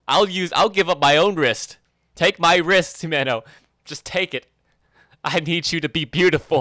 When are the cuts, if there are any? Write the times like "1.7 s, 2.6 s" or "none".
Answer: none